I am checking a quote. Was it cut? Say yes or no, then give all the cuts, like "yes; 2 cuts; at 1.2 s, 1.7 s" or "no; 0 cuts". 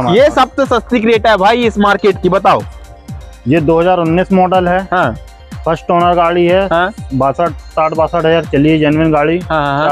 no; 0 cuts